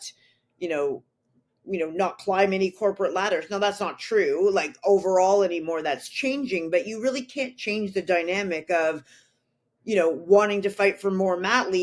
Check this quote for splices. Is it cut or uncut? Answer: uncut